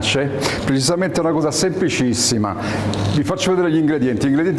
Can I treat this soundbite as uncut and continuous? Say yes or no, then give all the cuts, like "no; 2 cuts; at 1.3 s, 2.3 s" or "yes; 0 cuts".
yes; 0 cuts